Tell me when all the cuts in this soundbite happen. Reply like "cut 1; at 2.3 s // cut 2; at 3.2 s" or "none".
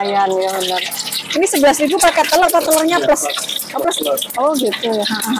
none